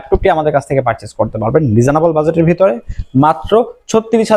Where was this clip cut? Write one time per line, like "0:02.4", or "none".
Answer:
none